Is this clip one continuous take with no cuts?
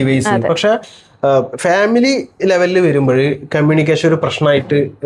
yes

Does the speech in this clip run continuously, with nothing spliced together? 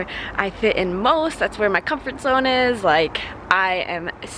yes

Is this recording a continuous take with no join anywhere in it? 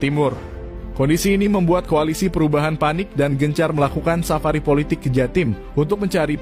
yes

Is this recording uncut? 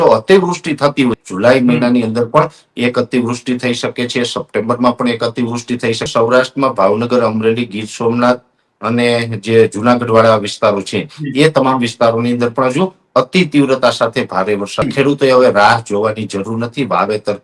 no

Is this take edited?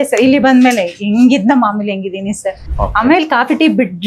yes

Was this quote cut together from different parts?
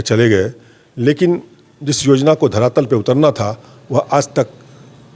no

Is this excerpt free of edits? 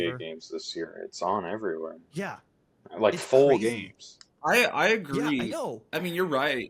yes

